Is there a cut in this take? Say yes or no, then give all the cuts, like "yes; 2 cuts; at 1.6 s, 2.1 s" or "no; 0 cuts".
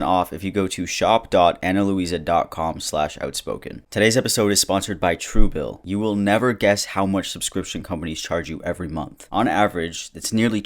yes; 1 cut; at 3.7 s